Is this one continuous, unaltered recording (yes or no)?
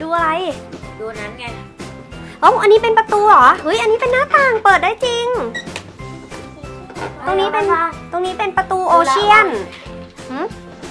yes